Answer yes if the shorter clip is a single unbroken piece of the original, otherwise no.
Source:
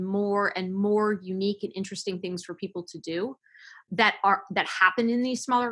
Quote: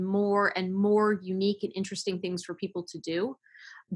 yes